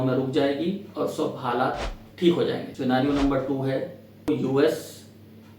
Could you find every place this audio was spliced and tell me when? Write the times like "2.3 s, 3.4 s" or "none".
2.7 s, 4.3 s